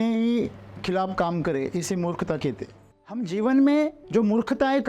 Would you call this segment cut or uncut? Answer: cut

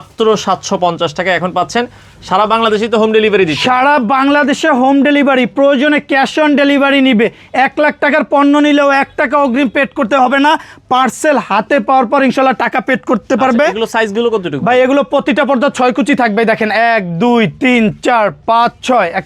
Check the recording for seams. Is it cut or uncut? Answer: uncut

